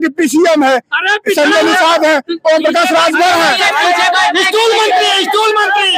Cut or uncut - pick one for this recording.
uncut